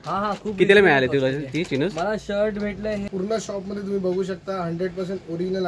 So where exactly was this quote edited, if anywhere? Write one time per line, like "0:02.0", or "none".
0:03.1